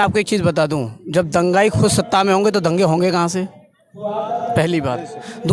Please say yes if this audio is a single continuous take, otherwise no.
yes